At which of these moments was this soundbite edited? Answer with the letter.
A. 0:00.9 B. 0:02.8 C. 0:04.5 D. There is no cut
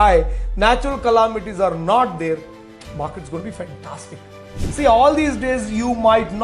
C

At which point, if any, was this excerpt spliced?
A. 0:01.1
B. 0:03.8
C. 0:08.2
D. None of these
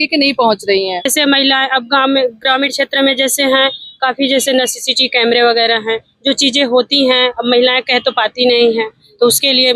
A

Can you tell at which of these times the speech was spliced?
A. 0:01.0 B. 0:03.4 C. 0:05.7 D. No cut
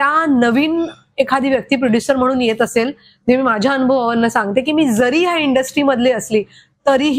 D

